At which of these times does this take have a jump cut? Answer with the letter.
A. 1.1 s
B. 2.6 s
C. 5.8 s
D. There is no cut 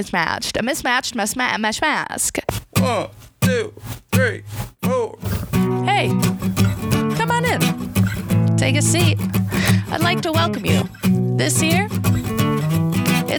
B